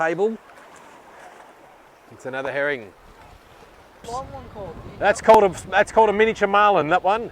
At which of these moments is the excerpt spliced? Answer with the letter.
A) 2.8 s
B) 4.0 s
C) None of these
B